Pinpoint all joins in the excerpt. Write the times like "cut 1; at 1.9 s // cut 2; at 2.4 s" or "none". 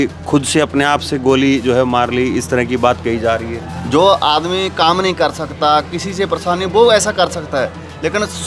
cut 1; at 3.6 s